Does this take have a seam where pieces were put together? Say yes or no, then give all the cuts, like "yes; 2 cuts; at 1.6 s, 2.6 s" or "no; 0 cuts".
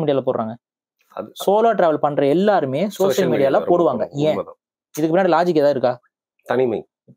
no; 0 cuts